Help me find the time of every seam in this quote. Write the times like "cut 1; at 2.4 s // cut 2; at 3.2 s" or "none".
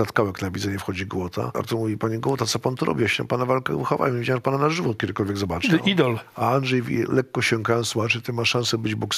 cut 1; at 1.5 s